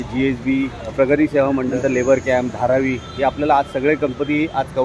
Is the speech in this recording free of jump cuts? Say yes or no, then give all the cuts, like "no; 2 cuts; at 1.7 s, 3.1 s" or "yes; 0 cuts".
no; 2 cuts; at 0.9 s, 1.8 s